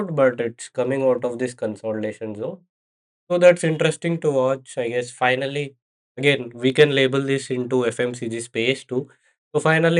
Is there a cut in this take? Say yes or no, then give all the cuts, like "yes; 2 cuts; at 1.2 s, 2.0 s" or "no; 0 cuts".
no; 0 cuts